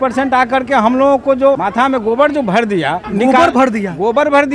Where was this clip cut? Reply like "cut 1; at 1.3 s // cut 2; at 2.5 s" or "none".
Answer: cut 1; at 1.6 s // cut 2; at 3.0 s